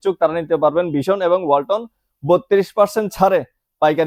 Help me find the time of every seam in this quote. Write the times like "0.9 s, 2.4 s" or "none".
none